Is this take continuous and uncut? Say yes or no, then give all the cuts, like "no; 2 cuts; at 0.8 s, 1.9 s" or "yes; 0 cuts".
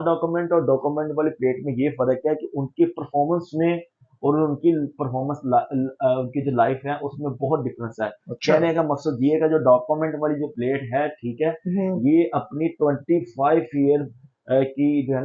yes; 0 cuts